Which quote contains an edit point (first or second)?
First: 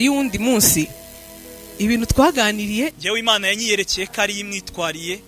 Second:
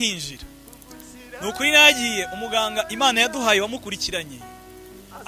first